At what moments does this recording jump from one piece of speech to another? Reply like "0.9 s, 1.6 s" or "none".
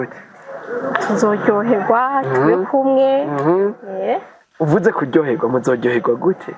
none